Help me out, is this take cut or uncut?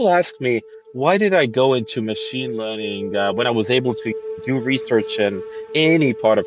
uncut